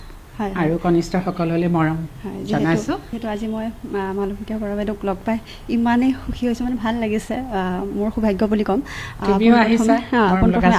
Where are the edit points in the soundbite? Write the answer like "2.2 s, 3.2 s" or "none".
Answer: 3.2 s